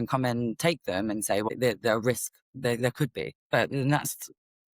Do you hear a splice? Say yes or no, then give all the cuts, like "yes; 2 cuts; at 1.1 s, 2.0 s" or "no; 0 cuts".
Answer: yes; 2 cuts; at 1.5 s, 3.4 s